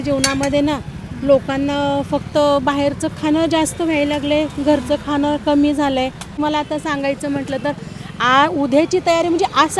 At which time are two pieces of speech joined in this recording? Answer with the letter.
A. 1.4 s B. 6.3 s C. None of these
B